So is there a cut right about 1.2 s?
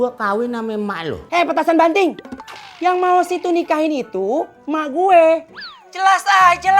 yes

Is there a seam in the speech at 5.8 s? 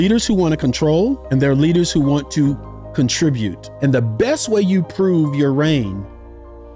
no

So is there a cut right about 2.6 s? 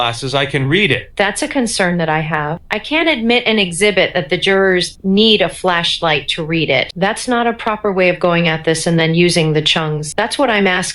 yes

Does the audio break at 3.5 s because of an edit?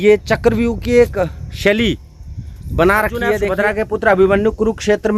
yes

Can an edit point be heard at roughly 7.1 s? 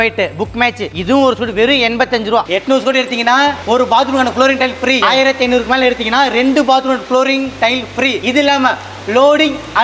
no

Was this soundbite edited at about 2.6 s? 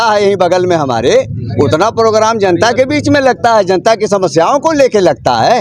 no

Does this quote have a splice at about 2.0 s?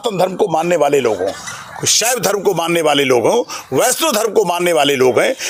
no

